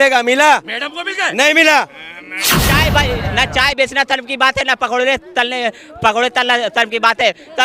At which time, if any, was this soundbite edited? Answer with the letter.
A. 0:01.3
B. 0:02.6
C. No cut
B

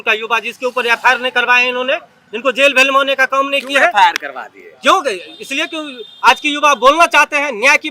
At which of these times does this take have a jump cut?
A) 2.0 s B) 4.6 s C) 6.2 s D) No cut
D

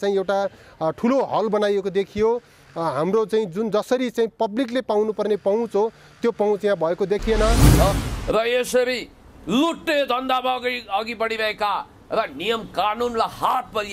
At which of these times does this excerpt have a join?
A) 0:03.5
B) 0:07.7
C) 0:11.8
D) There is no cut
B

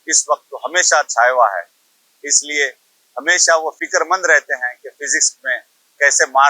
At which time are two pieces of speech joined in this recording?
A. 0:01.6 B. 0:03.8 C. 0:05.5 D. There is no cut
B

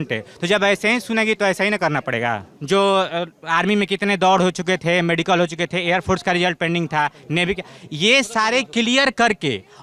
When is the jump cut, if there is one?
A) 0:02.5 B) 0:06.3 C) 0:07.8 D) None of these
A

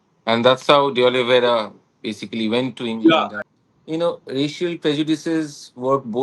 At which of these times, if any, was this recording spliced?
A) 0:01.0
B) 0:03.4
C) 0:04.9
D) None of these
B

